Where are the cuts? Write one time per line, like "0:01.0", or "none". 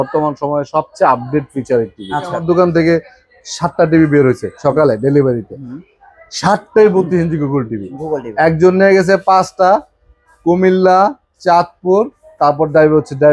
0:02.4